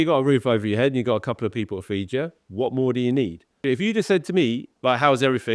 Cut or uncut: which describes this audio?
cut